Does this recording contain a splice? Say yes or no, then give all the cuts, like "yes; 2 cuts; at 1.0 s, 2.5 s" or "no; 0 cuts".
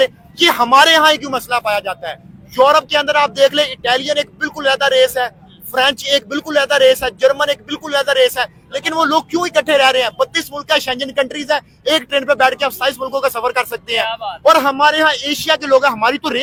no; 0 cuts